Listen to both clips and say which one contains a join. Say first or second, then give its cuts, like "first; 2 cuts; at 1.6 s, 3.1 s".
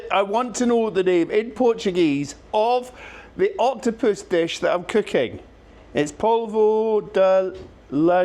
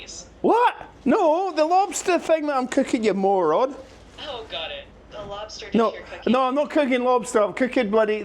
second; 1 cut; at 4.0 s